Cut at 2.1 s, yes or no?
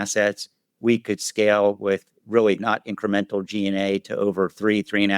yes